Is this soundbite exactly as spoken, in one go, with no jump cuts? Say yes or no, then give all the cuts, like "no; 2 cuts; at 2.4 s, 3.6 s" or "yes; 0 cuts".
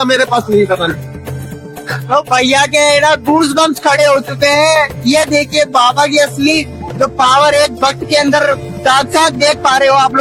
yes; 0 cuts